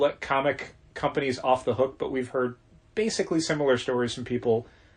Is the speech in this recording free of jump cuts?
yes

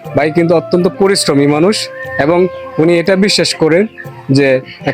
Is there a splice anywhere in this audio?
no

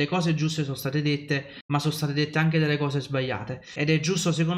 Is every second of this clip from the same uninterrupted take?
no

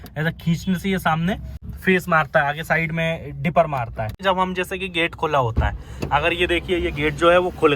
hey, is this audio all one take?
no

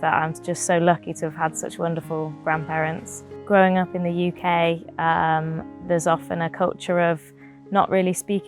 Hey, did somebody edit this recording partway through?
yes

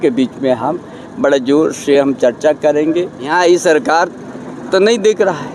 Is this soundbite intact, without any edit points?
no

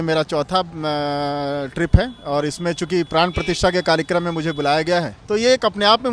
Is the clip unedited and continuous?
no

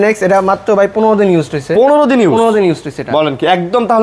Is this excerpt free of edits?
yes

